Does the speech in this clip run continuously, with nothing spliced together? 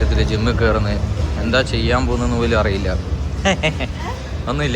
yes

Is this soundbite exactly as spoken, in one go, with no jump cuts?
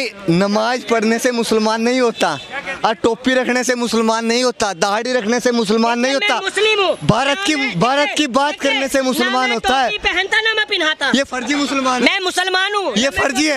yes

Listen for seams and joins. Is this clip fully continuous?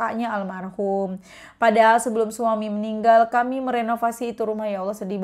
yes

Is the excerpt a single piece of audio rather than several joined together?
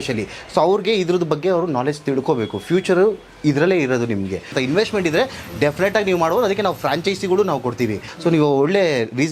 no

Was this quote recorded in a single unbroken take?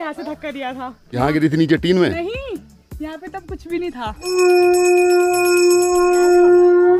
no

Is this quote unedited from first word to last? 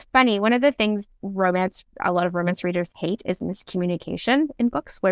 yes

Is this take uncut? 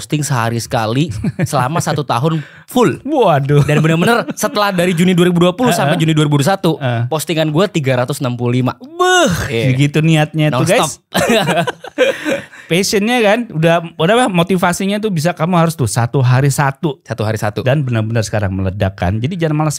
yes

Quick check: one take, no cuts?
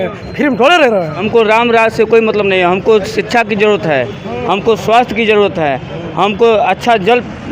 no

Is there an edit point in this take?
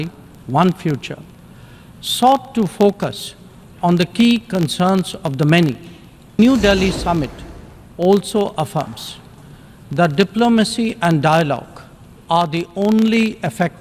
yes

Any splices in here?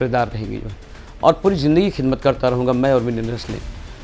no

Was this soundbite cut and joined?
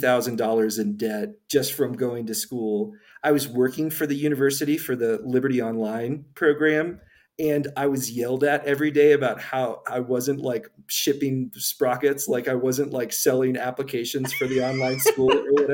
yes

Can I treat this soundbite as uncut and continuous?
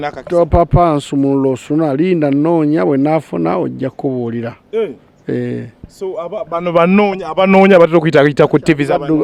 yes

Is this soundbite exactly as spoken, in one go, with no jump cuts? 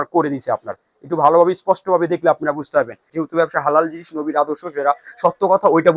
no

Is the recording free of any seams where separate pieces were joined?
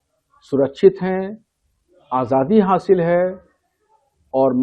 yes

